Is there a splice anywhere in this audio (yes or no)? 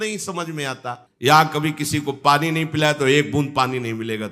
yes